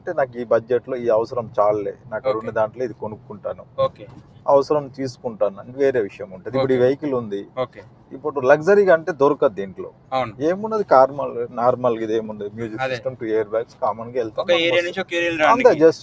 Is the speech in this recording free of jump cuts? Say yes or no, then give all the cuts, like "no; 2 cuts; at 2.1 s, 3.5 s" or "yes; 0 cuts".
yes; 0 cuts